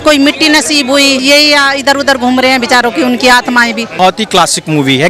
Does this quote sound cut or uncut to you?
cut